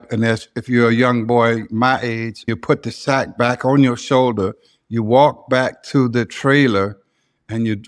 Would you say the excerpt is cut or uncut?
cut